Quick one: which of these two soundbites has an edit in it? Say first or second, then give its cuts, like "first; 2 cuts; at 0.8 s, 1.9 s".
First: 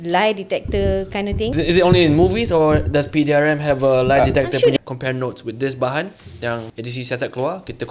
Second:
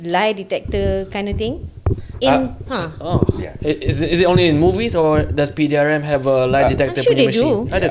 first; 3 cuts; at 1.5 s, 4.7 s, 6.7 s